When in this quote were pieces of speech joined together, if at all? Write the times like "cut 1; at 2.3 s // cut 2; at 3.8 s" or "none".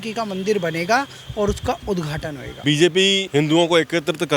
cut 1; at 2.6 s // cut 2; at 3.2 s